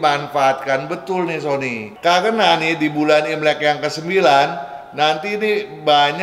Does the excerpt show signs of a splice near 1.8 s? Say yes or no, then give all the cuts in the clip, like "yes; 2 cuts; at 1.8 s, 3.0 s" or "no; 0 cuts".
yes; 1 cut; at 1.8 s